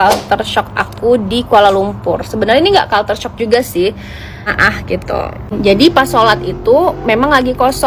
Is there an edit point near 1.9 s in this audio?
no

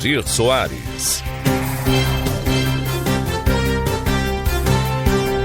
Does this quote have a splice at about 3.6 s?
yes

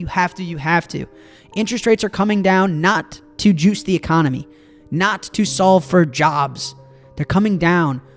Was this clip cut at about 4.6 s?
no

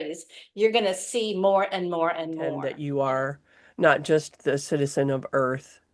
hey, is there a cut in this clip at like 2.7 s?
yes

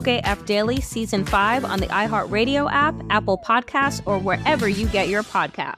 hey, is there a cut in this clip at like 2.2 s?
no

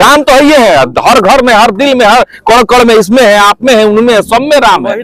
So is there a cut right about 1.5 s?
no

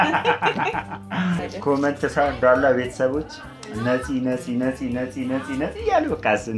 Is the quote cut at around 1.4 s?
yes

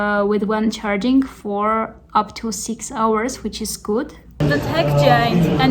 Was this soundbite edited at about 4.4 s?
yes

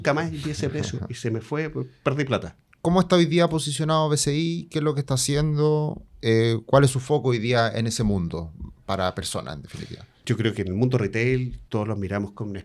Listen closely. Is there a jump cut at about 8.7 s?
no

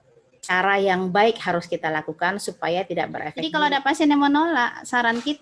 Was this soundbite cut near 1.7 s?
no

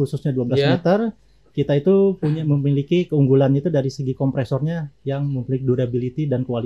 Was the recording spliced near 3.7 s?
no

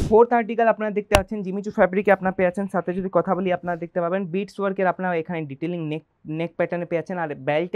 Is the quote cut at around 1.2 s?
no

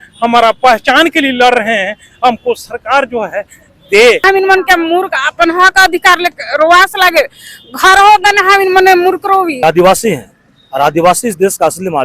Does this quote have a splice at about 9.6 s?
yes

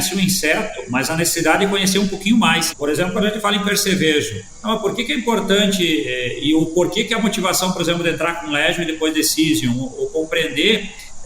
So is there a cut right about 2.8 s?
yes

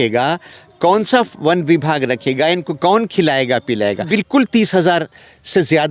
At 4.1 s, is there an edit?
yes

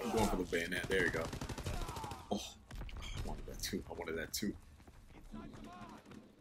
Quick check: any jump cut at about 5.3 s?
no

